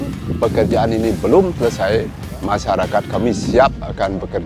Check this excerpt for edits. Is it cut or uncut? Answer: uncut